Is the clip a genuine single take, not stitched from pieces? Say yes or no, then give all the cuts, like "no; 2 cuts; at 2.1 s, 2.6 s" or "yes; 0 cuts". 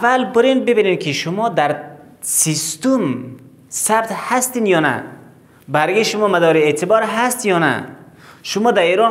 yes; 0 cuts